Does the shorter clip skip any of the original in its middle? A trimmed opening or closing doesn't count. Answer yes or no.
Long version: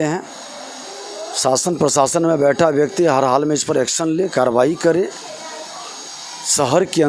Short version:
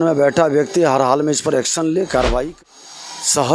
yes